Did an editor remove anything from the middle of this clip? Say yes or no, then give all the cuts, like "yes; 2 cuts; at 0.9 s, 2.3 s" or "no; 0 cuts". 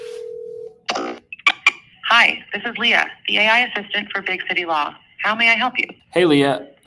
yes; 2 cuts; at 1.9 s, 5.9 s